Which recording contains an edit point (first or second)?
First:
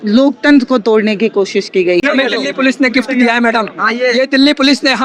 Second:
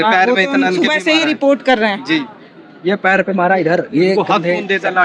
first